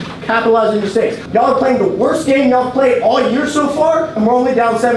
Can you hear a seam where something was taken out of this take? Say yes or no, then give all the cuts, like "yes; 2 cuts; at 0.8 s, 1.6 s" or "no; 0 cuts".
yes; 1 cut; at 1.2 s